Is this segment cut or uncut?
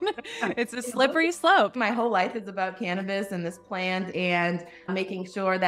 cut